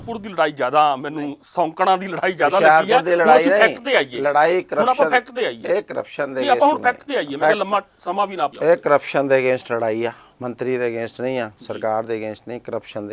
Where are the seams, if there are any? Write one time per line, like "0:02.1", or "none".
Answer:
0:08.5
0:10.3